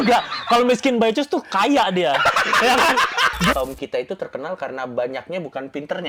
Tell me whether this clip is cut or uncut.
cut